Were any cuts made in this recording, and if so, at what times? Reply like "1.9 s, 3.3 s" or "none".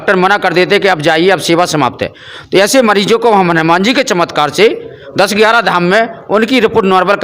none